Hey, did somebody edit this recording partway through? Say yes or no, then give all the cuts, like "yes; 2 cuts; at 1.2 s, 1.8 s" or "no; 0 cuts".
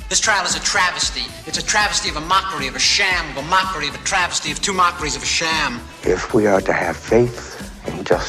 no; 0 cuts